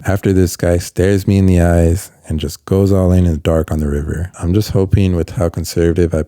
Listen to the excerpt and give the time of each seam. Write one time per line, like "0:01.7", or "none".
0:04.3

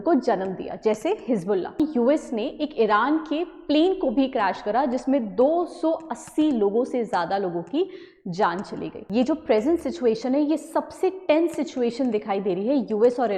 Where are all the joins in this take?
0:01.8
0:09.0

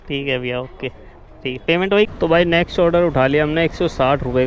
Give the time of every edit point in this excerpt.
0:02.1

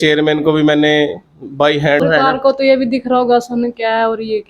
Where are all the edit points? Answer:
0:02.0

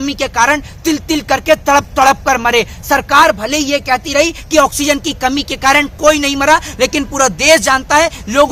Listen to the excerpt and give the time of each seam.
none

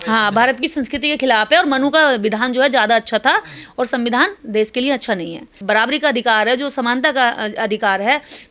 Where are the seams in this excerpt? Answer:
0:05.5

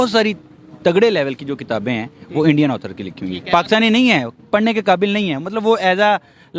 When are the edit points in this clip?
none

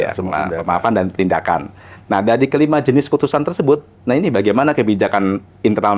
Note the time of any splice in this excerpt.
none

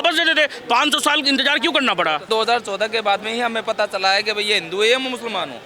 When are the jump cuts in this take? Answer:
0:02.2

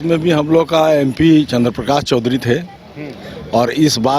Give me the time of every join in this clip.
none

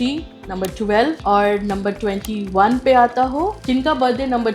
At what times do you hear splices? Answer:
0:01.2
0:03.6

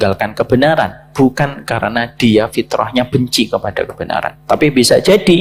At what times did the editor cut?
none

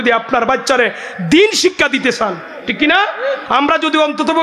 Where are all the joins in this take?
0:03.4

